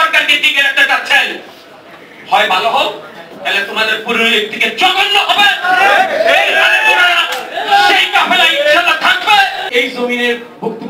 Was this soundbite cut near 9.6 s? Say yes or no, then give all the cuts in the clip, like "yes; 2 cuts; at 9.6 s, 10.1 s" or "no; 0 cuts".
yes; 1 cut; at 9.6 s